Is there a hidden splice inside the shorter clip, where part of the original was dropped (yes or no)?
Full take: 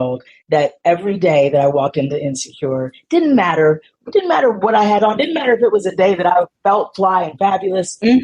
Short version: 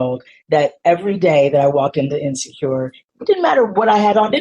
yes